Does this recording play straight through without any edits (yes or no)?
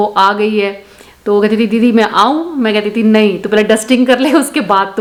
yes